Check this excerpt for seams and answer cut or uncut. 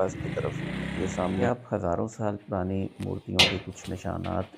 cut